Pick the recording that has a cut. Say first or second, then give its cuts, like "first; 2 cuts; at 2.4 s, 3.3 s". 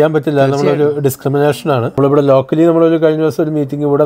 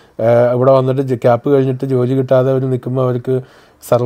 first; 1 cut; at 2.0 s